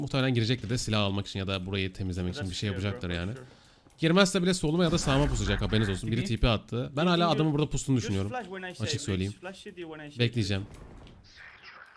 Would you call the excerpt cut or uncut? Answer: uncut